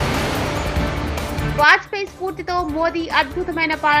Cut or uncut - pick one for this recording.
cut